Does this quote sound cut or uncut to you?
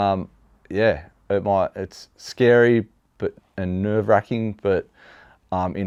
uncut